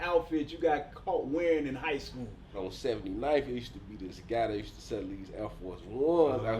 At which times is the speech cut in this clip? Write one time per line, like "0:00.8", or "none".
0:02.7